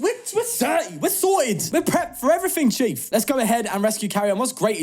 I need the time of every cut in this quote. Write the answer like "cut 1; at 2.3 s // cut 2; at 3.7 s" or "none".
cut 1; at 1.6 s // cut 2; at 3.0 s